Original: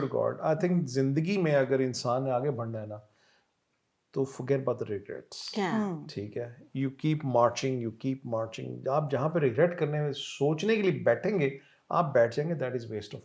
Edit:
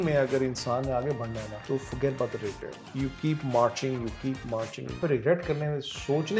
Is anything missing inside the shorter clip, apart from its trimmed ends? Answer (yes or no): yes